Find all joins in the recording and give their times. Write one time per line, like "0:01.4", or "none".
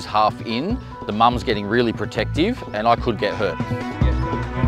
none